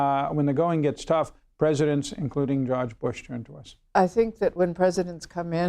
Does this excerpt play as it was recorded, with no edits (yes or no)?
no